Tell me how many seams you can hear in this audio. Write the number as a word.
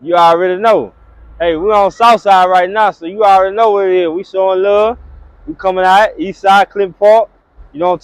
zero